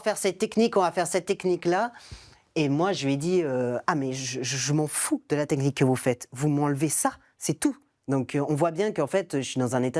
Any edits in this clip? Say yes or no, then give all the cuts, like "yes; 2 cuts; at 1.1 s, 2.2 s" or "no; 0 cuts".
yes; 1 cut; at 7.9 s